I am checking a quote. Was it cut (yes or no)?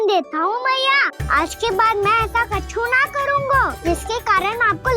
yes